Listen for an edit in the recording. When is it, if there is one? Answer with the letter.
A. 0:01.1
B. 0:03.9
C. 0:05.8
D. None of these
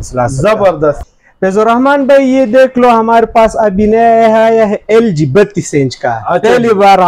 A